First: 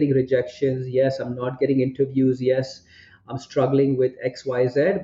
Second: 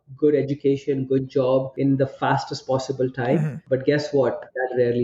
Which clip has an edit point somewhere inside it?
second; 2 cuts; at 1.7 s, 3.6 s

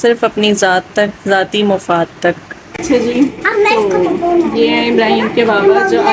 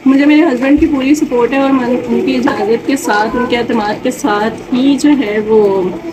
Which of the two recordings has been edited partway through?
first; 1 cut; at 2.8 s

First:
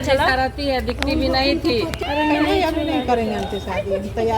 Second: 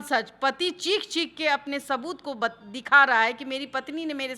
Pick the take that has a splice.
first; 1 cut; at 2.0 s

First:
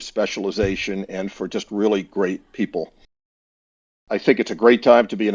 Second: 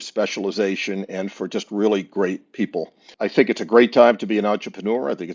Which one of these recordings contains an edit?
second; 1 cut; at 3.0 s

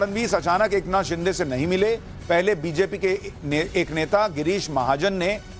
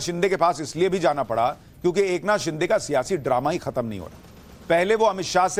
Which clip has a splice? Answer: first; 1 cut; at 1.4 s

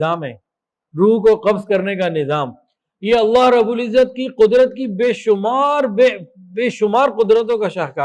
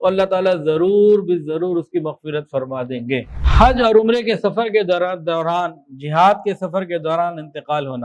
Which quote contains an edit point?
second; 1 cut; at 3.4 s

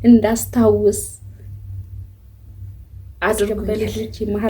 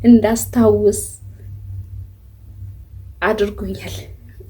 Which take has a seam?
first; 1 cut; at 3.5 s

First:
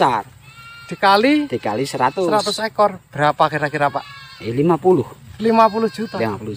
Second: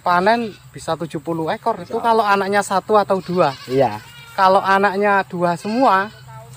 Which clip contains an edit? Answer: second; 1 cut; at 1.8 s

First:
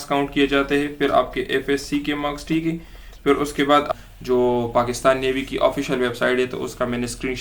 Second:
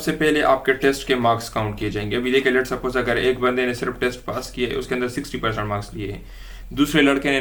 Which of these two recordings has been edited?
first; 1 cut; at 3.9 s

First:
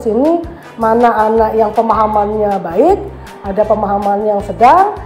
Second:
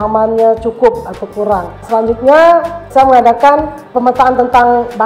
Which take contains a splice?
second; 3 cuts; at 1.8 s, 2.8 s, 3.8 s

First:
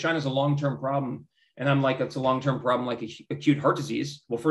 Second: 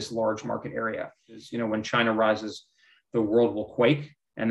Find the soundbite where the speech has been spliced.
second; 1 cut; at 1.5 s

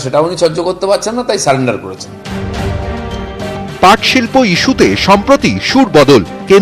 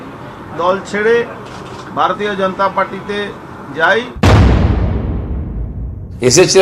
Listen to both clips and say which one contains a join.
second; 1 cut; at 4.1 s

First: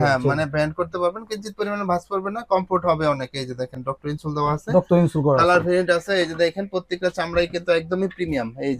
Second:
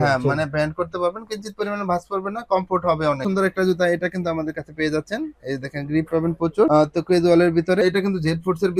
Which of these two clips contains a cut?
second; 2 cuts; at 3.3 s, 7.8 s

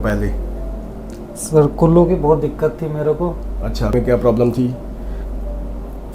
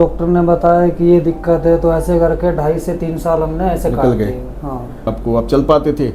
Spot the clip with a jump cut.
second; 1 cut; at 5.2 s

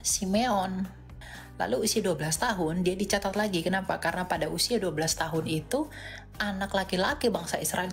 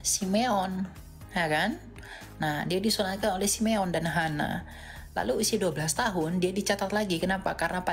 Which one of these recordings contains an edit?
first; 1 cut; at 1.2 s

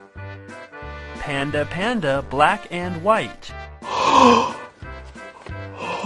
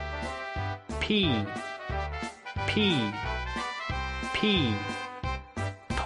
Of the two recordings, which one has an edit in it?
first; 2 cuts; at 1.1 s, 2.2 s

